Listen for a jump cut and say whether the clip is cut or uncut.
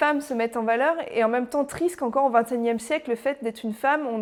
uncut